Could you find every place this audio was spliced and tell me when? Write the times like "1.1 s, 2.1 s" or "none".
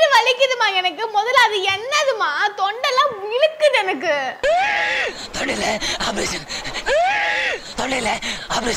none